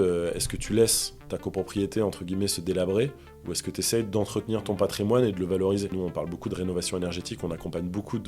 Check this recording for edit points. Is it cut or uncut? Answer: cut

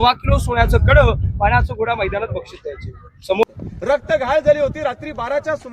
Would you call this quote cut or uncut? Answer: cut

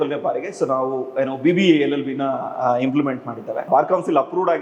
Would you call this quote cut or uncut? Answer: cut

